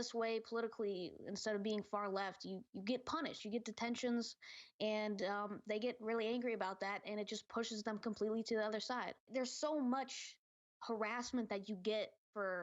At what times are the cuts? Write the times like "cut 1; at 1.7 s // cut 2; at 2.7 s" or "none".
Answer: cut 1; at 9.3 s